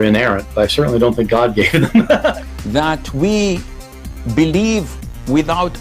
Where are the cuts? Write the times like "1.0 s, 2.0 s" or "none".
2.3 s